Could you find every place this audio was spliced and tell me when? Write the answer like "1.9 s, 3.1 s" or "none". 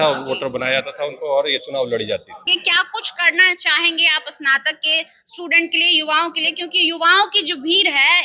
2.6 s